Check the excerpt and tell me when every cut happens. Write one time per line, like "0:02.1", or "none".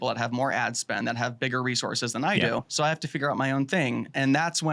0:02.7

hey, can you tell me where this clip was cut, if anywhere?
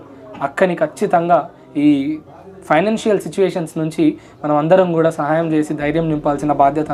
none

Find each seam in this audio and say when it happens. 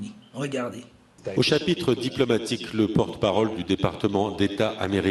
none

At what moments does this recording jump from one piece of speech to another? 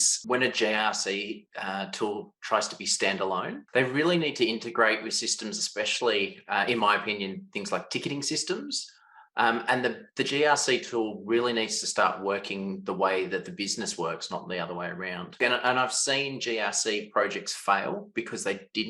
0:03.6
0:15.4

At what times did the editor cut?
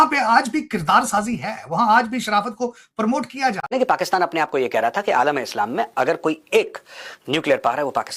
0:03.7

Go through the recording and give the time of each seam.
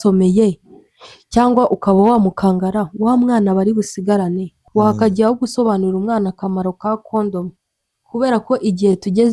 0:04.5

